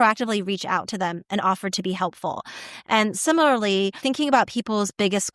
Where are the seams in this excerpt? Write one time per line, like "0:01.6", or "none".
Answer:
0:04.0